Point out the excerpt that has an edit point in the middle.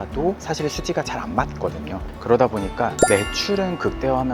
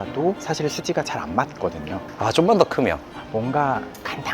second; 2 cuts; at 2.1 s, 3.1 s

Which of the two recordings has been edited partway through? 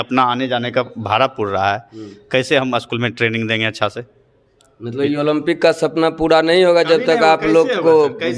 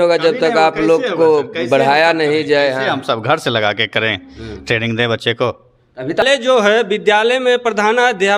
second; 1 cut; at 6.2 s

